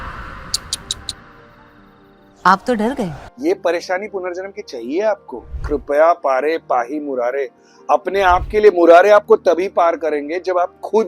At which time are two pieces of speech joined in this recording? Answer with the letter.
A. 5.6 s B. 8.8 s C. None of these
A